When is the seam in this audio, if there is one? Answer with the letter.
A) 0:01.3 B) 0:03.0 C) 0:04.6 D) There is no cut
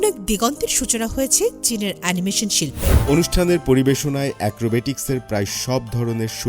B